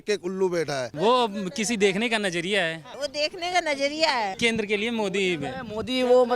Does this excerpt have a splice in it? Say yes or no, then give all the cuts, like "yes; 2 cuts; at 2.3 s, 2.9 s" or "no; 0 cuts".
yes; 3 cuts; at 0.9 s, 2.9 s, 4.3 s